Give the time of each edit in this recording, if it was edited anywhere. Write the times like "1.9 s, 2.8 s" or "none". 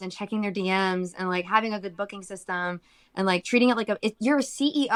none